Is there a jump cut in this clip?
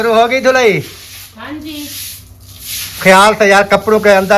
no; 0 cuts

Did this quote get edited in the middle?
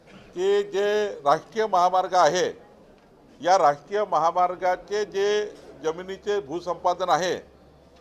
no; 0 cuts

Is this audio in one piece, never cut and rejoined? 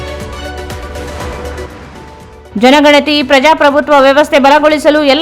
no; 1 cut; at 1.7 s

